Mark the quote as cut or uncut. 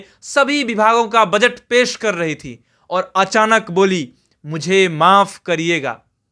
uncut